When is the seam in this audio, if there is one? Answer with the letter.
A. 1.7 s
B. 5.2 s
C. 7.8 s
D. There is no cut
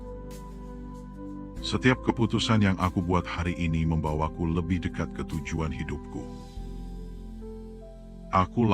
A